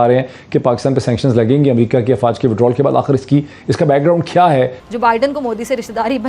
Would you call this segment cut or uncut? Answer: cut